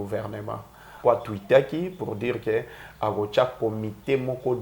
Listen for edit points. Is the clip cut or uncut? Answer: cut